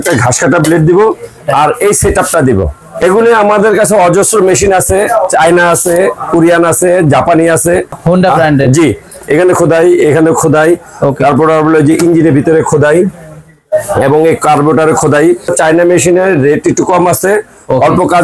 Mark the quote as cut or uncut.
cut